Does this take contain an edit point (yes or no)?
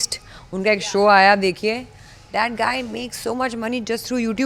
no